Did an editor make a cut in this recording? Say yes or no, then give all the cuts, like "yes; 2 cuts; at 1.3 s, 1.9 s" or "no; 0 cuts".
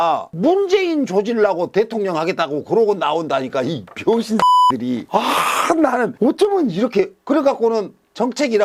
no; 0 cuts